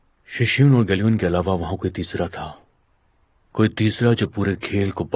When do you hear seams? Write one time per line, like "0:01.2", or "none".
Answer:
none